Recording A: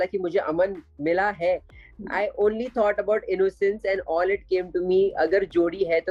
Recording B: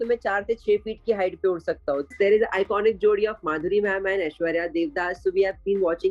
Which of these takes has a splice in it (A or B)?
B